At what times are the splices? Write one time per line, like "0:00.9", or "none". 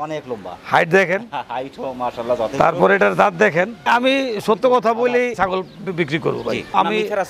0:03.8